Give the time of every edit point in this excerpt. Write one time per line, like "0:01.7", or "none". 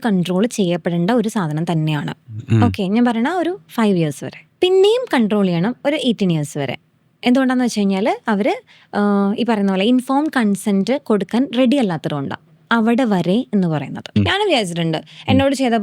0:04.5
0:14.2